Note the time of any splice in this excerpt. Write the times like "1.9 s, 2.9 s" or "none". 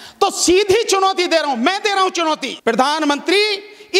2.5 s